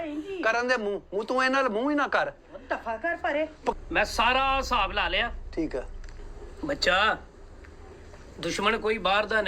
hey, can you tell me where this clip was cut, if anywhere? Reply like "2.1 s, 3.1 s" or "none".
3.8 s